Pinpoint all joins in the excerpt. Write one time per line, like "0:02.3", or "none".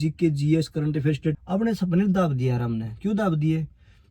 0:01.4